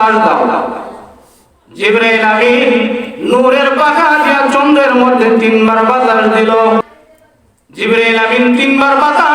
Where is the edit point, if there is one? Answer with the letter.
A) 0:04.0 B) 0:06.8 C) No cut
B